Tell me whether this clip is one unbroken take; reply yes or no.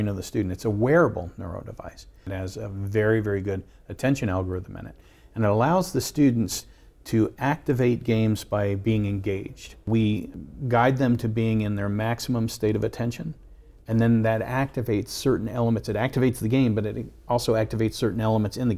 no